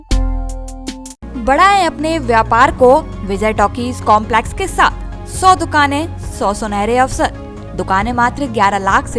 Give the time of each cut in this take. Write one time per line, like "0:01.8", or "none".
none